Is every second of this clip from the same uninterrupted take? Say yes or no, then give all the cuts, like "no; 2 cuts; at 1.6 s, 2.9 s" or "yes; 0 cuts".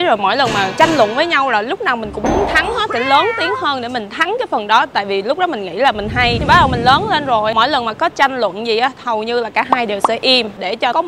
yes; 0 cuts